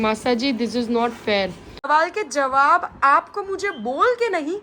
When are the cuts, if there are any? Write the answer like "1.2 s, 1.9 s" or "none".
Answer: 1.7 s